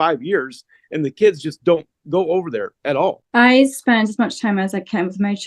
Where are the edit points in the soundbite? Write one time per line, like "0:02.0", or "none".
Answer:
0:03.2